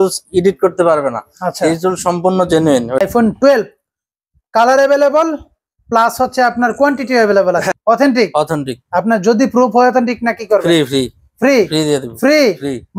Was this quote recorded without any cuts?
no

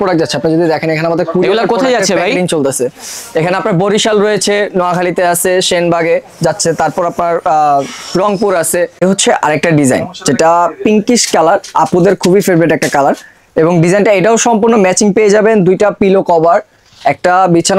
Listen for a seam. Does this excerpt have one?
yes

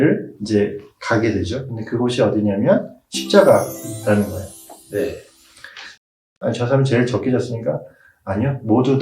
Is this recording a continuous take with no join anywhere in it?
no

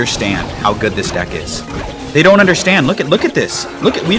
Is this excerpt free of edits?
yes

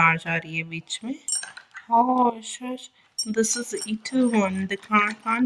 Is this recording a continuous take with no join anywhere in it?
yes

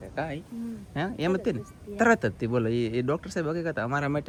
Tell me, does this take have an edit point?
no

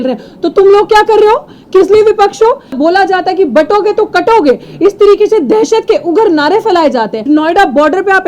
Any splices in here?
yes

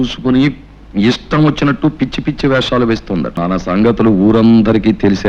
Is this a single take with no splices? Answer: no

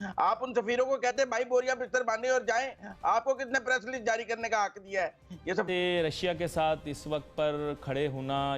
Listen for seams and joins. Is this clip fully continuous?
no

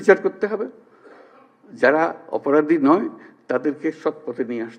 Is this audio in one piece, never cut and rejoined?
yes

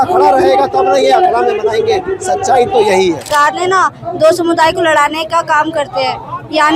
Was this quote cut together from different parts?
yes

